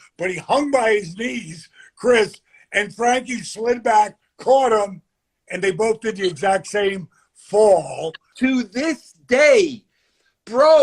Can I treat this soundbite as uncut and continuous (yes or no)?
no